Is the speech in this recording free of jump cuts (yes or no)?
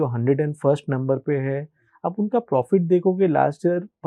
yes